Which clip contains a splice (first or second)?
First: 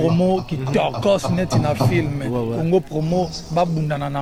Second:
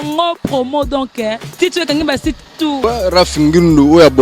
second